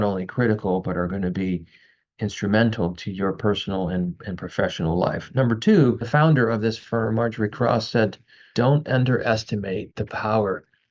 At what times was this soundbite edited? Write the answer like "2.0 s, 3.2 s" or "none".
6.0 s, 8.5 s